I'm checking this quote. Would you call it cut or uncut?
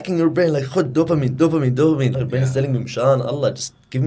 cut